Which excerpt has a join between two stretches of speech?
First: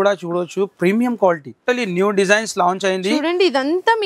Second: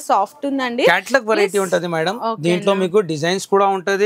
first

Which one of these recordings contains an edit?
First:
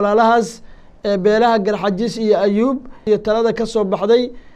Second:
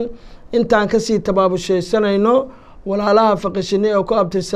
first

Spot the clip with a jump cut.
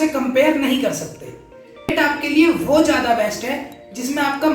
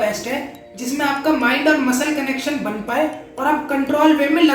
first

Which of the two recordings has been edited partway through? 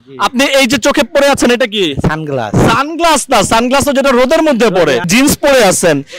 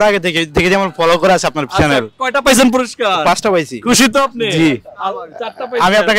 first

